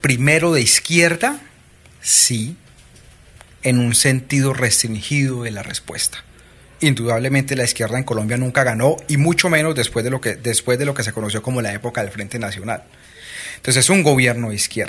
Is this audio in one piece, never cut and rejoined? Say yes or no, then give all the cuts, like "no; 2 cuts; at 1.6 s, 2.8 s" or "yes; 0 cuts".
yes; 0 cuts